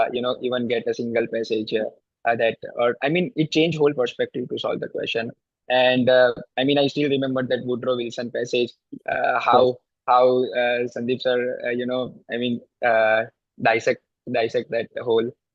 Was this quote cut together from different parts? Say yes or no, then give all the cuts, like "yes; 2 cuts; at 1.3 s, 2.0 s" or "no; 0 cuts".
no; 0 cuts